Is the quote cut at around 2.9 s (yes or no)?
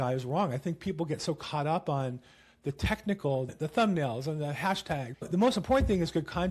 no